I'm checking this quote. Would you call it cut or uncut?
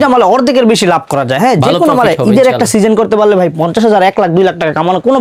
uncut